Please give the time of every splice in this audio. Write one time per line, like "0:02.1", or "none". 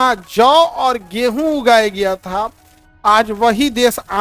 none

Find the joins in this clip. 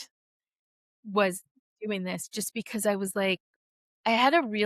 0:01.4

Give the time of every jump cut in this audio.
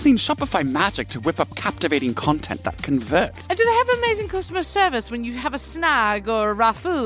0:03.4

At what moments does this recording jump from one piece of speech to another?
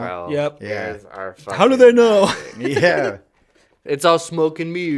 none

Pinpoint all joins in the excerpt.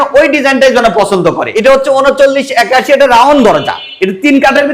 0:01.5

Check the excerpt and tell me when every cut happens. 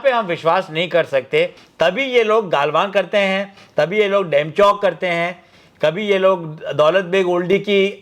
0:01.6

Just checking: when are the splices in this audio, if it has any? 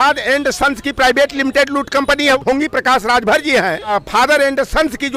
0:02.4
0:03.9

